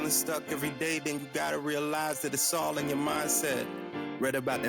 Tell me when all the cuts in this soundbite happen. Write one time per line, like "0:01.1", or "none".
none